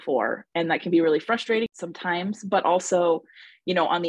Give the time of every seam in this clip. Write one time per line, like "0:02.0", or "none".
0:01.7